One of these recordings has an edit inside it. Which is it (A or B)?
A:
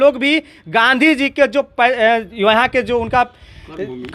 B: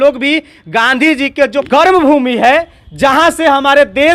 B